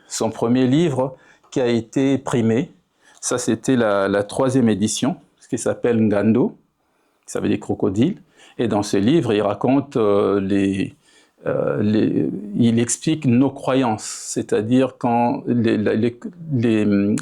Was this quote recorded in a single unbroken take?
yes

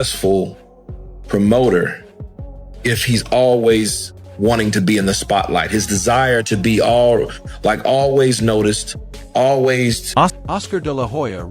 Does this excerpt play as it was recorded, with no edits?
no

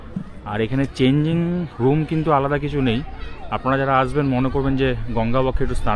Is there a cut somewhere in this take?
no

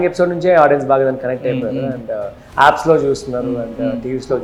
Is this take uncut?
yes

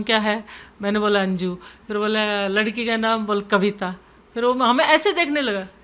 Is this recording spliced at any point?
no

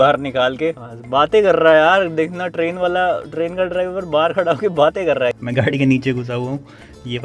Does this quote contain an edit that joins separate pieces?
yes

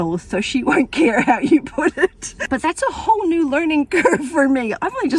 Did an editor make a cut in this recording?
yes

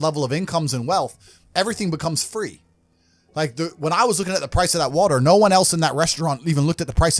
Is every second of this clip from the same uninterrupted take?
yes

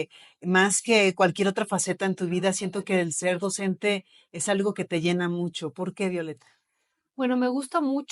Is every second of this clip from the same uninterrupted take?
yes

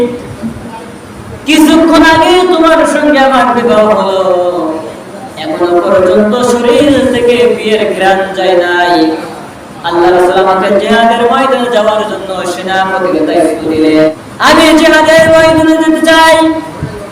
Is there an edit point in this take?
yes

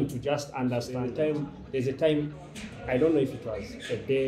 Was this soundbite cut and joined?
yes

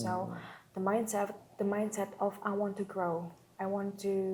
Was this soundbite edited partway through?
no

